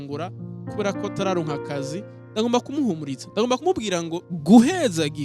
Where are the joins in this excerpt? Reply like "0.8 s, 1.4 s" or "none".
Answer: 4.3 s